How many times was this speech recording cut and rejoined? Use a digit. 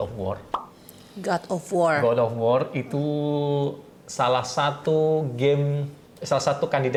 0